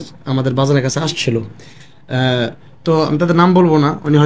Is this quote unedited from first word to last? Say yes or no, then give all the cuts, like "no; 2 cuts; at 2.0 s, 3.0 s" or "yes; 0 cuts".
yes; 0 cuts